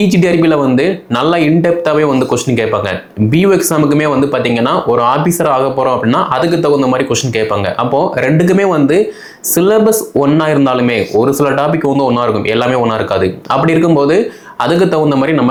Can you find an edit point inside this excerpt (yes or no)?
no